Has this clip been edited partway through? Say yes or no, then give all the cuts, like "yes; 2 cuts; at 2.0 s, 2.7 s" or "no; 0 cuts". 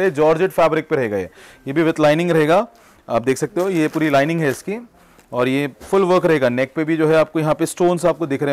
no; 0 cuts